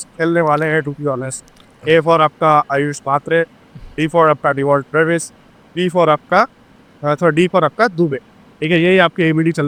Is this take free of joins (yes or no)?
yes